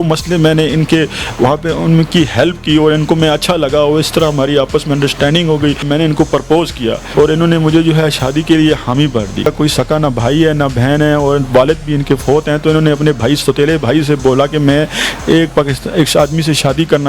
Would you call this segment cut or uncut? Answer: cut